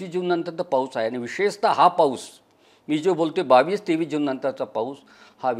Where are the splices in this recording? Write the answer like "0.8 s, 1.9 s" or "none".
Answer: none